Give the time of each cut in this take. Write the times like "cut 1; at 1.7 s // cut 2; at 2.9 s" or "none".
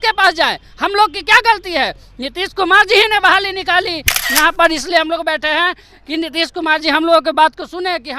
cut 1; at 4.2 s